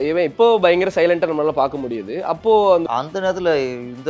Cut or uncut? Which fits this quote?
cut